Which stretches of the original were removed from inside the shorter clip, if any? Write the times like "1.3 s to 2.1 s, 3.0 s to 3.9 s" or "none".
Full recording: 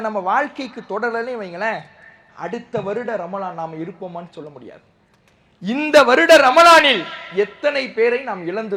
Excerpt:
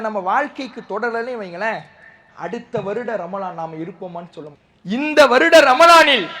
4.6 s to 5.4 s